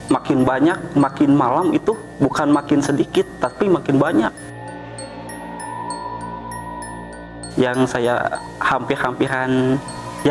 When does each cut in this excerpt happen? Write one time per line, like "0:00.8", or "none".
none